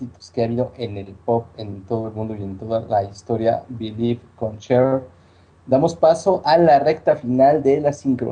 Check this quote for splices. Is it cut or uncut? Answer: uncut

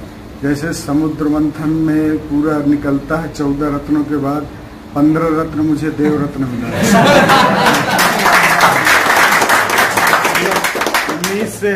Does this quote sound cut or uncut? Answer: uncut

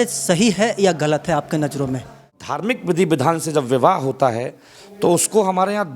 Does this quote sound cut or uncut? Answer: cut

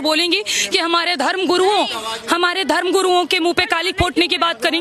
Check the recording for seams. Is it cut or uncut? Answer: uncut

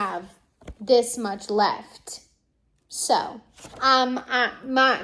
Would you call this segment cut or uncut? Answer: uncut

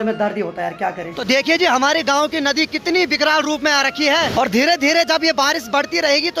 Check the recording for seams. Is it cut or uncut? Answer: cut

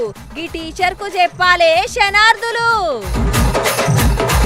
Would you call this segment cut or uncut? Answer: uncut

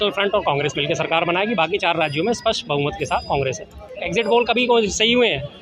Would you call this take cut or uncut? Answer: cut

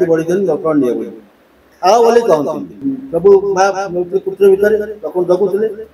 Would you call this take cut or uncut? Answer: cut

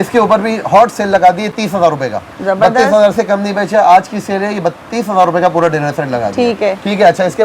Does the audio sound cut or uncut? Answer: uncut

